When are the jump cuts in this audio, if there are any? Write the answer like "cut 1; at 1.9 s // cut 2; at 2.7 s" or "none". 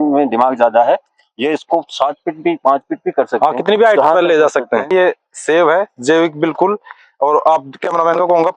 cut 1; at 4.9 s